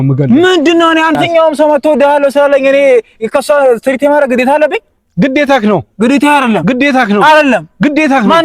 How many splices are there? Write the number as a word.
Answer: one